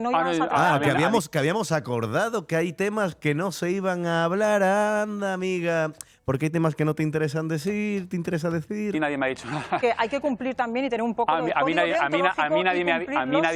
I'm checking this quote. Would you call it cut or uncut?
uncut